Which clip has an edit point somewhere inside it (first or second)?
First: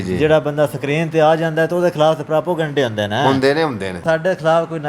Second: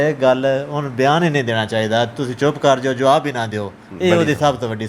first